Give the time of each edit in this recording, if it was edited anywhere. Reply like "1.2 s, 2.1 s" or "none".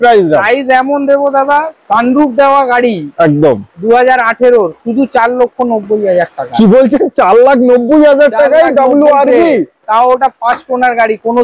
none